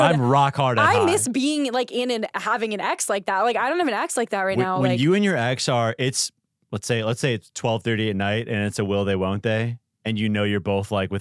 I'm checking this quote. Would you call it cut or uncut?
uncut